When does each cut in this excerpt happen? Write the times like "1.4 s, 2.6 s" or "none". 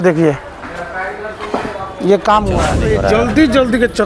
2.8 s